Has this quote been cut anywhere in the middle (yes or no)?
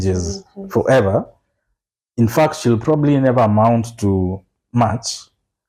no